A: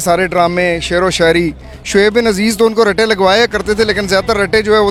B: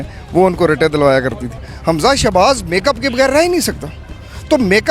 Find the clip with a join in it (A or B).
B